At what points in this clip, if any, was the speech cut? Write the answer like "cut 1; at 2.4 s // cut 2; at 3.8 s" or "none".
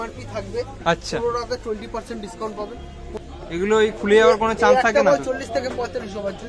cut 1; at 3.2 s